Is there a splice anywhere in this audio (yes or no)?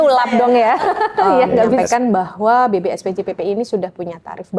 yes